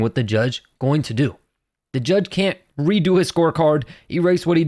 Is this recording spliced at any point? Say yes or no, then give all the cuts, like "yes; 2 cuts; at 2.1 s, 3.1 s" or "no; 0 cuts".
no; 0 cuts